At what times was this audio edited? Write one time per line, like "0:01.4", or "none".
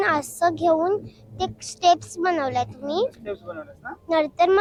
none

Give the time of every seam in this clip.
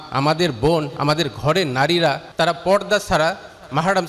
0:02.2

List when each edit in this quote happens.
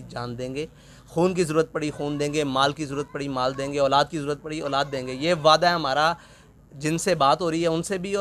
none

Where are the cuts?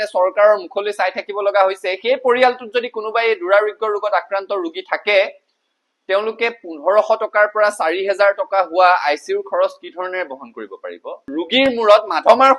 0:11.3

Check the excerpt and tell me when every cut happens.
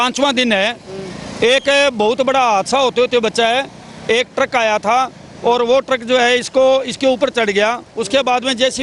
none

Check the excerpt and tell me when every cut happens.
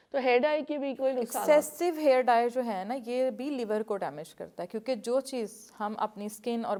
none

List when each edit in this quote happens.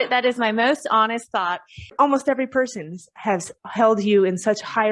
0:01.9

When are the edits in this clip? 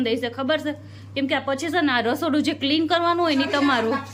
none

